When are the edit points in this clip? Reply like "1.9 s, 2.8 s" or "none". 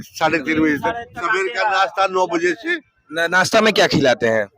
1.2 s